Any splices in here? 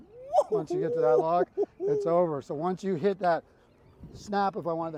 no; 0 cuts

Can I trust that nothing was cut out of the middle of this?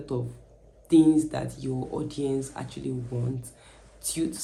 yes; 0 cuts

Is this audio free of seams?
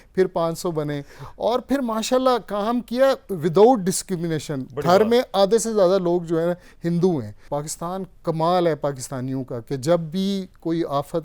no; 1 cut; at 7.4 s

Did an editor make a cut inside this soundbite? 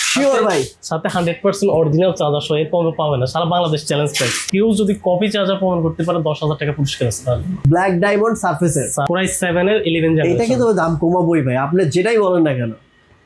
yes; 3 cuts; at 4.5 s, 7.6 s, 9.1 s

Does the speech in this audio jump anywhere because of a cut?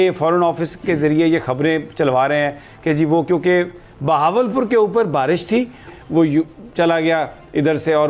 yes; 1 cut; at 5.9 s

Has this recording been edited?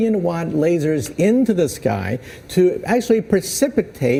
no; 0 cuts

